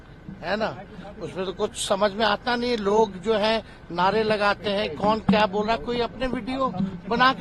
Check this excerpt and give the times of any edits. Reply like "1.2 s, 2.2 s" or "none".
none